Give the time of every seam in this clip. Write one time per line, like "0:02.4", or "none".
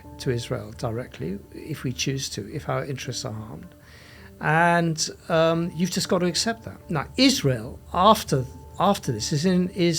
0:06.8